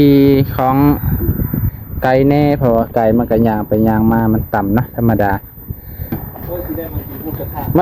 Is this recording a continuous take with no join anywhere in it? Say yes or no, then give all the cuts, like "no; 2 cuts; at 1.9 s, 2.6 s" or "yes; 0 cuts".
no; 1 cut; at 6.2 s